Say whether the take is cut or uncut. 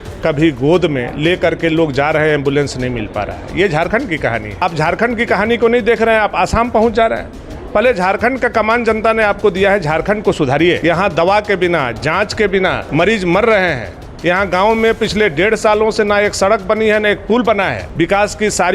cut